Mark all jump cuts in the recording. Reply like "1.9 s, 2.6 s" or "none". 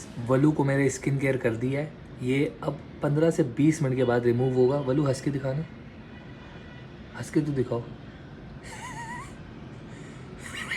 none